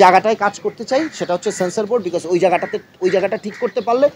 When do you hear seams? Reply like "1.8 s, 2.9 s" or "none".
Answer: none

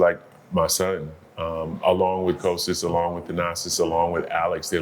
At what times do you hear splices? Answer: none

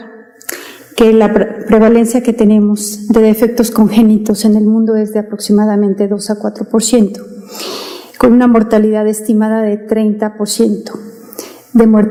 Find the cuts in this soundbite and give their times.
none

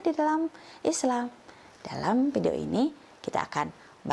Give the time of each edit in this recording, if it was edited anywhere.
none

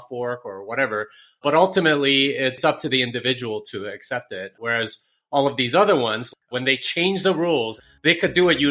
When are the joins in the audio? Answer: 2.6 s, 6.3 s, 7.8 s

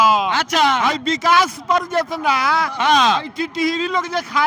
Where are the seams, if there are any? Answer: none

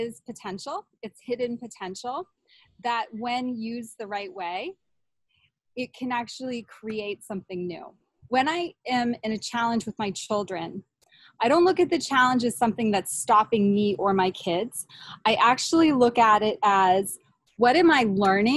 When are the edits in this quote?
8.1 s

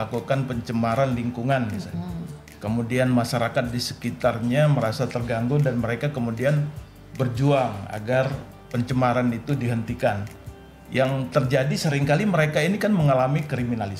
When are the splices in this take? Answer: none

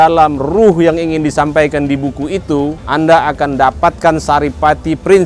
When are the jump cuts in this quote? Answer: 2.8 s

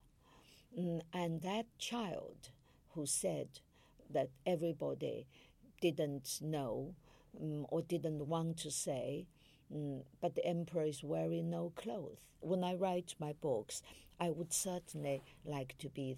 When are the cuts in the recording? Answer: 12.3 s

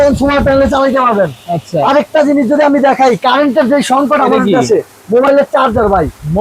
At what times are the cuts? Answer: none

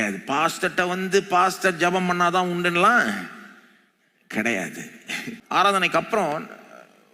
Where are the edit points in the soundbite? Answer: 5.5 s

